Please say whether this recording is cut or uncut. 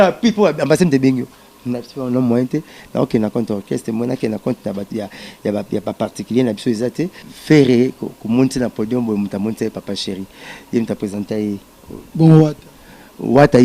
cut